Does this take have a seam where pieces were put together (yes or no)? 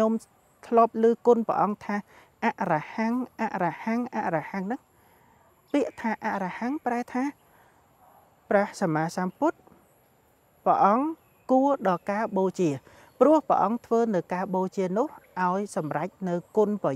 no